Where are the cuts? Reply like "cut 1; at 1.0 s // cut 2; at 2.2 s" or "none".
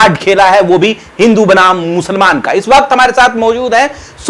none